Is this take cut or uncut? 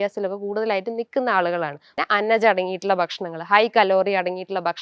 cut